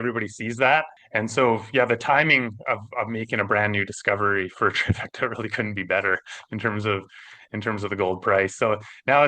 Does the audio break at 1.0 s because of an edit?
yes; 1 cut; at 1.0 s

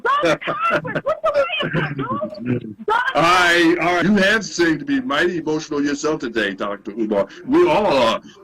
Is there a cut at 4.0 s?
yes; 1 cut; at 4.0 s

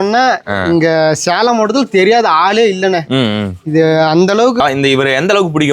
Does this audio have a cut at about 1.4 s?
no; 1 cut; at 4.6 s

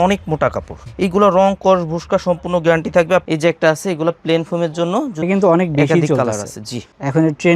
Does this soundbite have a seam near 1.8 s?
no; 2 cuts; at 3.2 s, 5.3 s

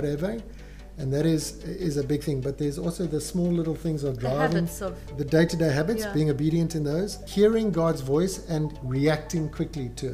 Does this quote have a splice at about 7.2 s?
yes; 3 cuts; at 5.1 s, 7.2 s, 8.8 s

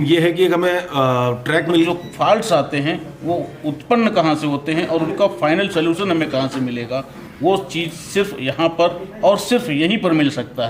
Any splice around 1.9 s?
yes; 1 cut; at 1.9 s

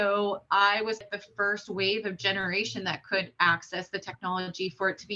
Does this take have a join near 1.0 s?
yes; 1 cut; at 1.0 s

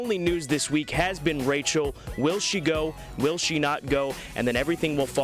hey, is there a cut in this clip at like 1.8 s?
no; 0 cuts

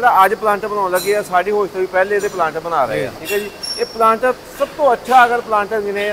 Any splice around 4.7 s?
no; 1 cut; at 3.1 s

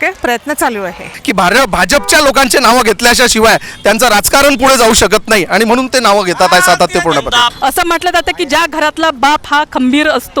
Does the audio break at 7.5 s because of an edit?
yes; 2 cuts; at 1.1 s, 7.5 s

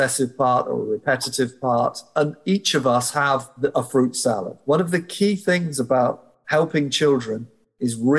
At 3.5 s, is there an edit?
yes; 2 cuts; at 3.5 s, 4.5 s

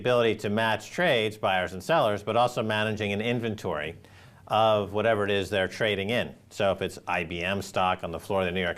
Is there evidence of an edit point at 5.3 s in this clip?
no; 1 cut; at 3.3 s

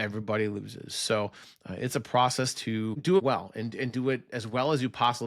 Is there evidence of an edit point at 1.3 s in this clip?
no; 0 cuts

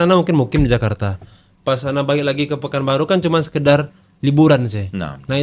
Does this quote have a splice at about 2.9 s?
no; 0 cuts

